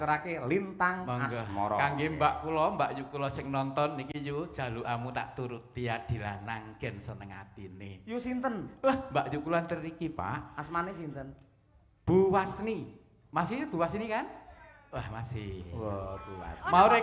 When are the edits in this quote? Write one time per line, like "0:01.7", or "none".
none